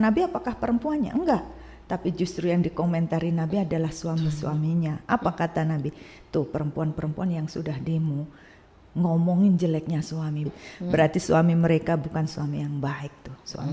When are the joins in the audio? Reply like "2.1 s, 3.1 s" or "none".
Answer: none